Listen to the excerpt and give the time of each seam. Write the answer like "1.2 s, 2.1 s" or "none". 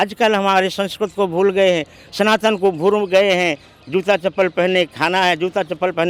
none